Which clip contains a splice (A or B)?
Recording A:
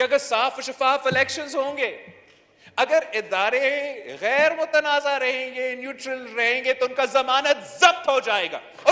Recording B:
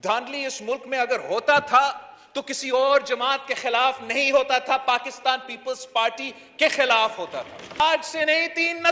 B